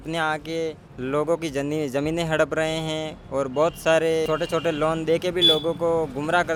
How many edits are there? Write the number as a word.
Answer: zero